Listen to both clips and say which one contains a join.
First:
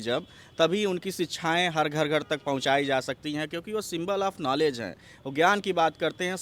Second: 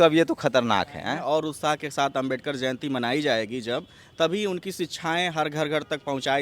second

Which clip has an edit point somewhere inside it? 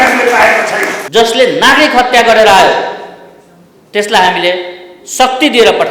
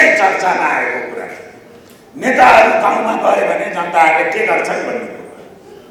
first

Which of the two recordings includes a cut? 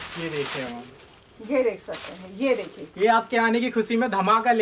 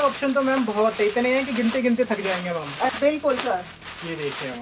second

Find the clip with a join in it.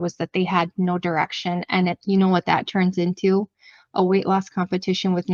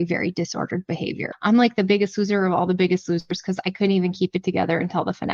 second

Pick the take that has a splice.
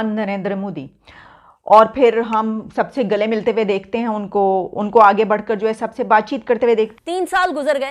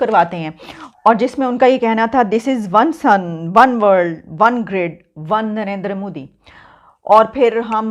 first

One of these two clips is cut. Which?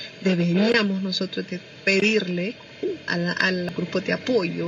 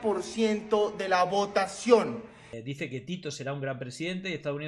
second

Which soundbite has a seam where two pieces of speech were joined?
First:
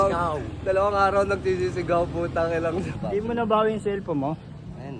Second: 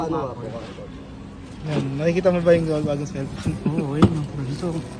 first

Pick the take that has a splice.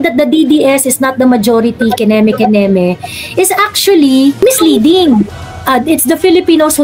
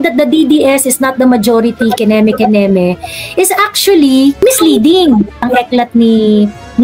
first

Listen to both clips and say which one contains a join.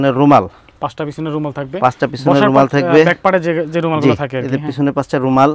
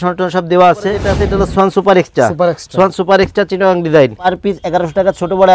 second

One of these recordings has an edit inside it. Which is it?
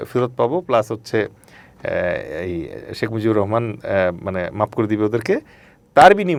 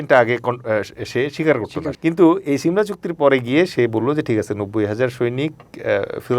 second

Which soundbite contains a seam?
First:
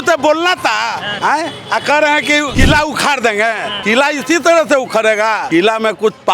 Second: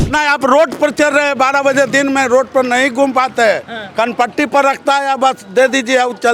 first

